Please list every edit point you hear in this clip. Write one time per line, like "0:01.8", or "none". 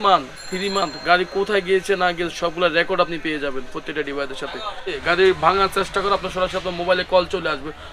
0:05.0